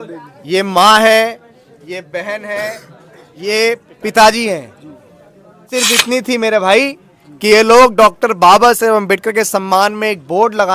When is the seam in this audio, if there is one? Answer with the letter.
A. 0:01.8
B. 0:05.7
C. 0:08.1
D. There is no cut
B